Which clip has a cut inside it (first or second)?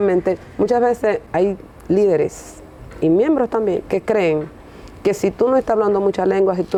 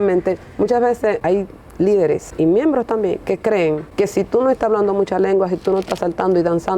second